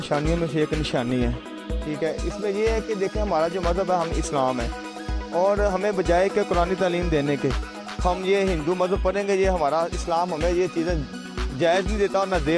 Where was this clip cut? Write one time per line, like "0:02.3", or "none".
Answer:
none